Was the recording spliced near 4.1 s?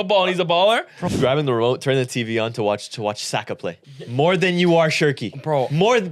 yes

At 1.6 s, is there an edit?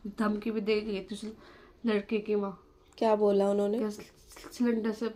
no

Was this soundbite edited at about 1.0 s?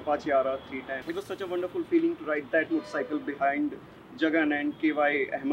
yes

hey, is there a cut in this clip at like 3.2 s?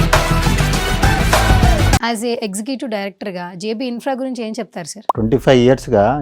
no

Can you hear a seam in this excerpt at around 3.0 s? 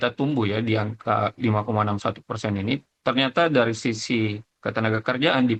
no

